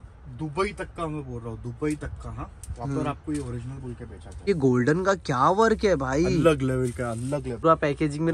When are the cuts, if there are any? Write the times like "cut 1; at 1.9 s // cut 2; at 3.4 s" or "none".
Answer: cut 1; at 4.5 s // cut 2; at 7.6 s